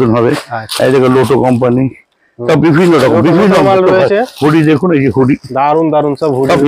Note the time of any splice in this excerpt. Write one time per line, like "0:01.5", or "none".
0:04.3